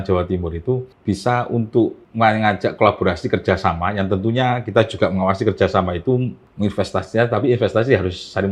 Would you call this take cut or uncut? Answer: cut